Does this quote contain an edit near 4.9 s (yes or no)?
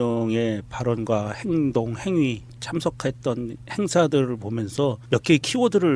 no